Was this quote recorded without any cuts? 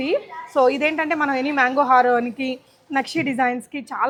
yes; 0 cuts

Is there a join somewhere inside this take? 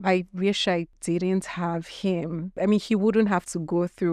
yes; 2 cuts; at 0.9 s, 2.5 s

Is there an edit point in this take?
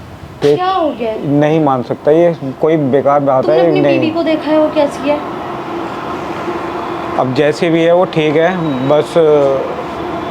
no; 0 cuts

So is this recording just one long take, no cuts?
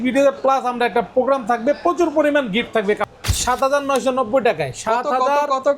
no; 1 cut; at 3.1 s

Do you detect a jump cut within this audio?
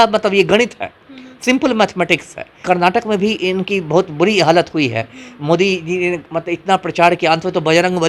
yes; 1 cut; at 2.6 s

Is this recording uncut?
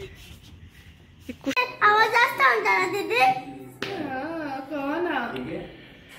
no; 1 cut; at 1.5 s

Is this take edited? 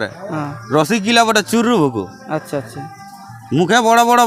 no; 0 cuts

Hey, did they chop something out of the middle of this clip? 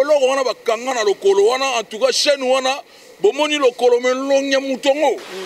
no; 0 cuts

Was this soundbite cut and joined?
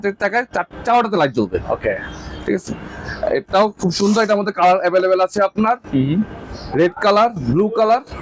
no; 0 cuts

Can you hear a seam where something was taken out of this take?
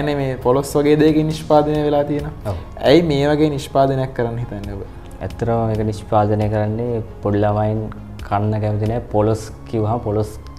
no; 0 cuts

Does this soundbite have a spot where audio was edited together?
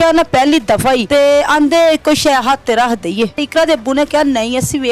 yes; 2 cuts; at 1.1 s, 3.5 s

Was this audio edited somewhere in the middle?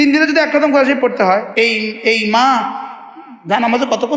yes; 1 cut; at 1.5 s

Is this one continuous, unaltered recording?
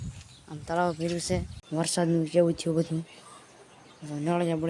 no; 1 cut; at 1.6 s

